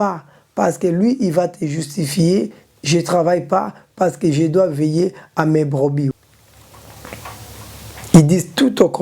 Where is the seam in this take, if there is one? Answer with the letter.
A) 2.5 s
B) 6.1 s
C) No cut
B